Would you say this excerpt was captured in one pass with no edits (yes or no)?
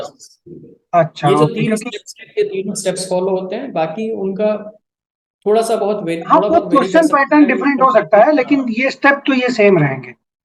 yes